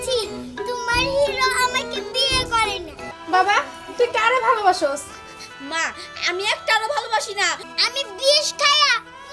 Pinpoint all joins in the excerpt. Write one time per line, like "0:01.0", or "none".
0:03.1
0:07.7